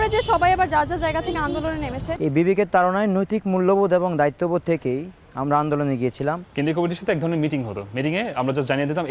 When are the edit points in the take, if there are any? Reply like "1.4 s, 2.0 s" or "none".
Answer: 2.2 s, 6.4 s